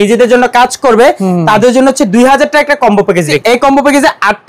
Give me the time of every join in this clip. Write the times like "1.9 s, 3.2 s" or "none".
3.4 s